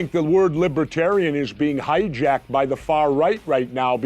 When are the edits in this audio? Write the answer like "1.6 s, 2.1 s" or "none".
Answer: 2.6 s